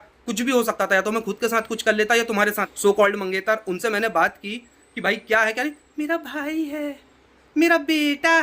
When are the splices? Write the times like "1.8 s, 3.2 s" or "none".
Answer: 2.7 s